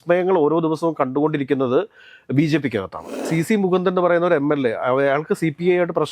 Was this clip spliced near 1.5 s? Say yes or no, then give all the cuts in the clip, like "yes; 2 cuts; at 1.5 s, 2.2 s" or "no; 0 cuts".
no; 1 cut; at 3.2 s